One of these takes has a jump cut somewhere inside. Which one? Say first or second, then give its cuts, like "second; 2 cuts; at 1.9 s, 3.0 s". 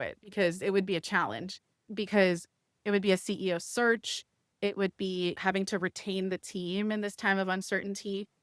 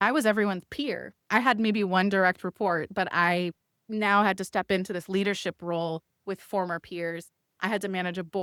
first; 1 cut; at 5.4 s